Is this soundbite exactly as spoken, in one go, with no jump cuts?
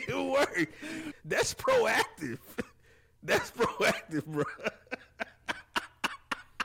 no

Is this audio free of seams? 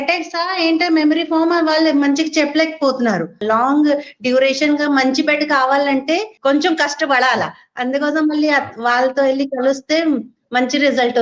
no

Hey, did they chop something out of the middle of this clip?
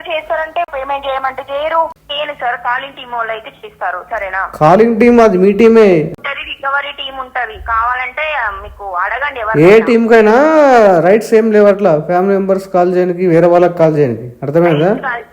yes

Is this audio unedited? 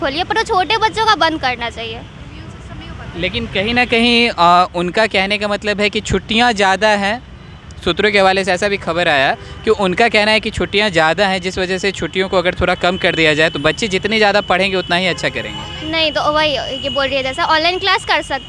yes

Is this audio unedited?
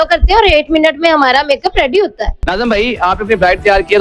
no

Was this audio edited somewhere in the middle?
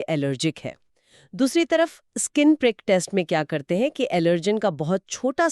no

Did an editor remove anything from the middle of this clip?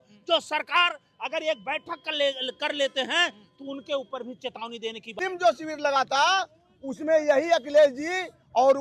yes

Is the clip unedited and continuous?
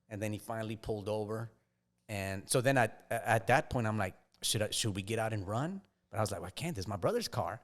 yes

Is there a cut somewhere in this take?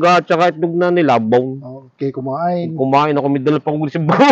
no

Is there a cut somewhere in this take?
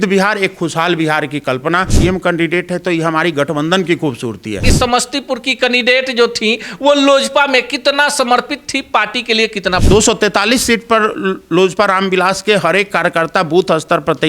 yes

